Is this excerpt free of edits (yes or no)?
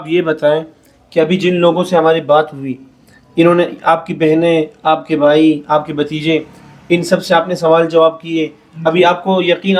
yes